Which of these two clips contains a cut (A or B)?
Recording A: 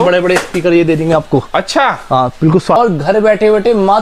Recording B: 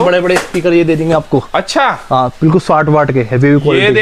A